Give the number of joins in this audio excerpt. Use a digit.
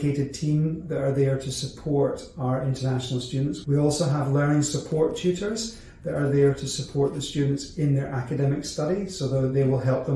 1